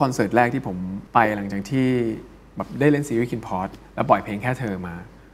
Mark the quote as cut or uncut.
cut